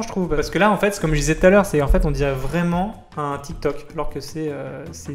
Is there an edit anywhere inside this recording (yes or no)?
no